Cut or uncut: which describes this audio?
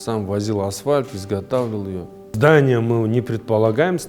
cut